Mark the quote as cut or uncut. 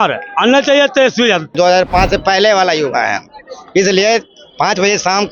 cut